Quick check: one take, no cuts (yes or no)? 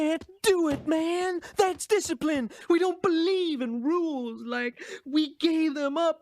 no